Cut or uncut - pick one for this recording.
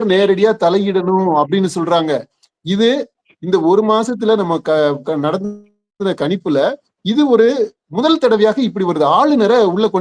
uncut